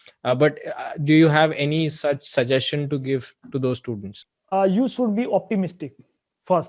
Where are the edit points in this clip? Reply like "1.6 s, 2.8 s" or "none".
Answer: 4.2 s